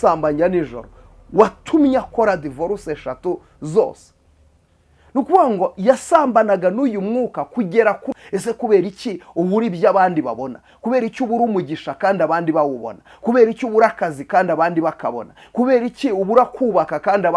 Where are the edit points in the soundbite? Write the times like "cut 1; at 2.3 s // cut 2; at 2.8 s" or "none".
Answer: cut 1; at 8.1 s